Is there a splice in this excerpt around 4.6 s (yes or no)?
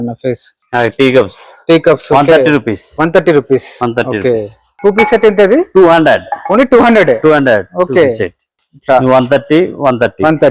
yes